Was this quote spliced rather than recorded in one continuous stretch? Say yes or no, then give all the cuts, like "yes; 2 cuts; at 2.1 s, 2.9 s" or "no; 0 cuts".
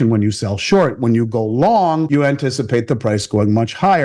yes; 1 cut; at 2.1 s